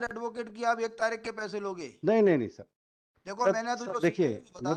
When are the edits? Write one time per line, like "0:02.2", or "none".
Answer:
none